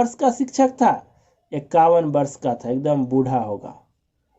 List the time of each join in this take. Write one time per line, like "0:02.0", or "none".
none

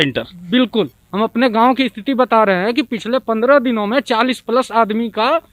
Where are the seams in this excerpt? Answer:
0:01.0

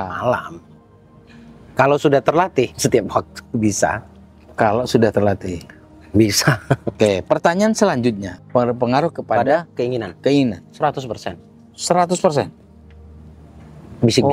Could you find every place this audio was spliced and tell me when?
0:08.3

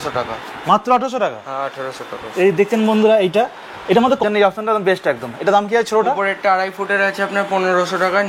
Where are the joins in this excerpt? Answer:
0:04.2

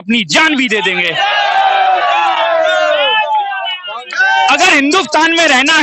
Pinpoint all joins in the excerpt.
none

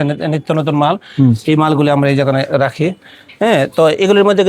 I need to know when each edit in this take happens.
none

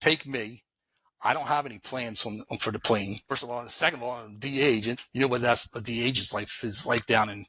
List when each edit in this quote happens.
0:03.3
0:05.0

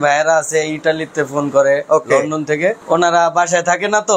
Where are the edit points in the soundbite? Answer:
0:02.8

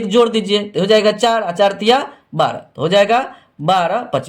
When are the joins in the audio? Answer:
none

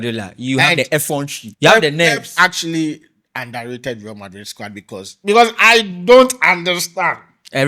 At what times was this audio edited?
0:01.4

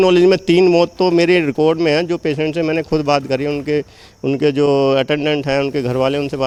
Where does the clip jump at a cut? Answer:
none

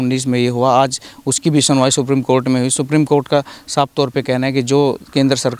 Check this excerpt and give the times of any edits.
none

